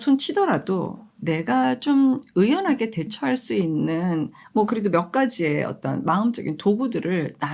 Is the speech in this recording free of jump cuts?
yes; 0 cuts

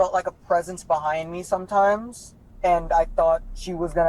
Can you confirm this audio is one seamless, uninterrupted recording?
yes; 0 cuts

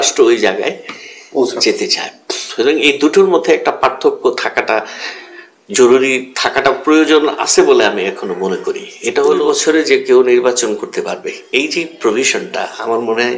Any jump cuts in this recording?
yes; 1 cut; at 9.4 s

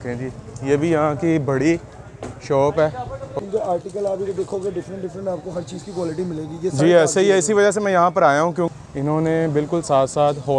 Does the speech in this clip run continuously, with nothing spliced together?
no; 2 cuts; at 3.3 s, 8.7 s

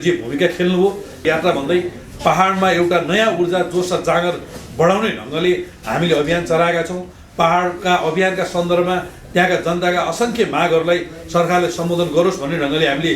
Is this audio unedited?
no; 1 cut; at 1.2 s

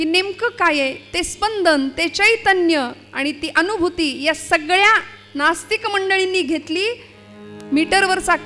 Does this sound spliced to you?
no; 0 cuts

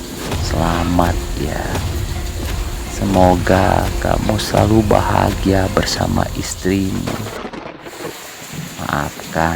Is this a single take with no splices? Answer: no; 2 cuts; at 7.1 s, 8.8 s

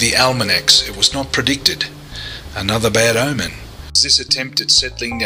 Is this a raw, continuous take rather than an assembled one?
no; 1 cut; at 4.1 s

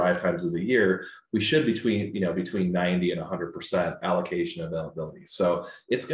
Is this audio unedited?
yes; 0 cuts

